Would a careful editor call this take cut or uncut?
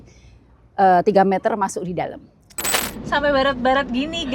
cut